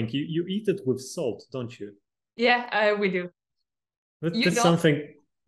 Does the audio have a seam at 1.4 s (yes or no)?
no